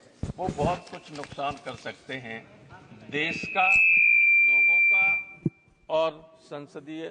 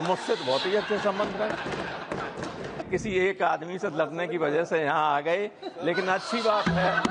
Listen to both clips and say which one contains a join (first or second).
second